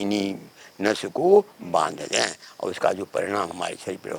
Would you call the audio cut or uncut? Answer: uncut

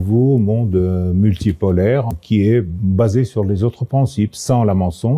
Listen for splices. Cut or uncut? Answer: cut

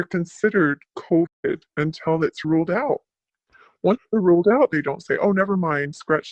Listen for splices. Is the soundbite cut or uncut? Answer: cut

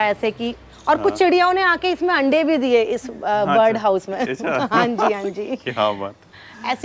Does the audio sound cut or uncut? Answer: uncut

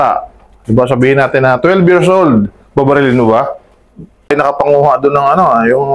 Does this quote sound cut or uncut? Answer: cut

